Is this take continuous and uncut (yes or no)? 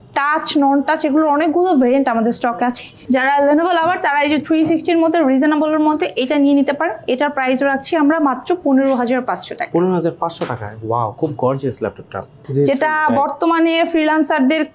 no